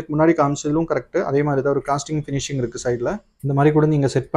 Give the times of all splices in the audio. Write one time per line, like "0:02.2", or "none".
0:03.3